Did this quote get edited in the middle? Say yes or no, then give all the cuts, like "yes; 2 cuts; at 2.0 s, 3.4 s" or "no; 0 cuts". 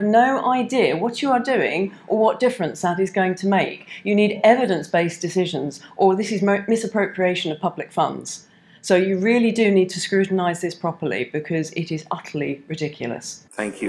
no; 0 cuts